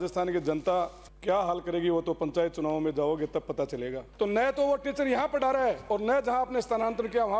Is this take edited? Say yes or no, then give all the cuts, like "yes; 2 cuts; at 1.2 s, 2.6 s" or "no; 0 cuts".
yes; 2 cuts; at 1.1 s, 4.0 s